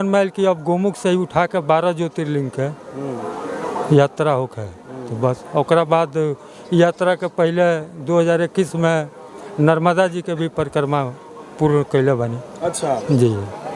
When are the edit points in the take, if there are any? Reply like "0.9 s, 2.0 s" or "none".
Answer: none